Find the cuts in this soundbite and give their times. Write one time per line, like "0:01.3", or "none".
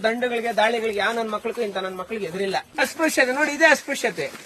0:02.7